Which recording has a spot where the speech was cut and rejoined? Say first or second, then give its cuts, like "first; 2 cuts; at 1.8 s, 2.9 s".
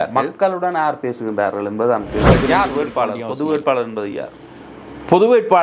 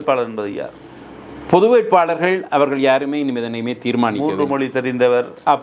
first; 1 cut; at 2.3 s